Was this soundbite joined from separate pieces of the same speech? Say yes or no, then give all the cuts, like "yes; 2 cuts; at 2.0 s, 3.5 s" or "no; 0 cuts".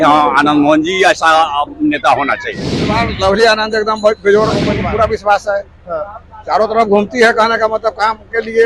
yes; 2 cuts; at 3.0 s, 4.8 s